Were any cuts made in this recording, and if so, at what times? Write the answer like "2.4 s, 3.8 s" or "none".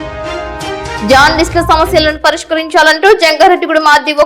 1.0 s